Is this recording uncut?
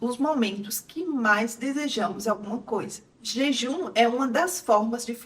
no; 1 cut; at 3.0 s

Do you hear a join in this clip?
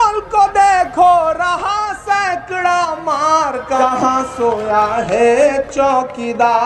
yes; 1 cut; at 3.8 s

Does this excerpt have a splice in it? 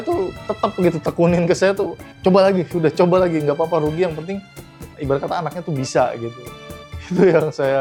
no; 0 cuts

